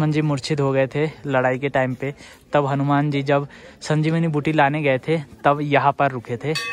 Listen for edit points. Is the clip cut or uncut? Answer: uncut